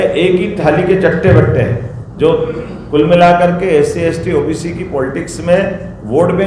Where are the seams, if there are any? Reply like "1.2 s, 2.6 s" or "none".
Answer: none